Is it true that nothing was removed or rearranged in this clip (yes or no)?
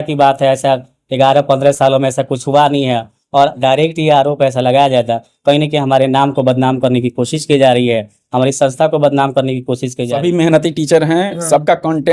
no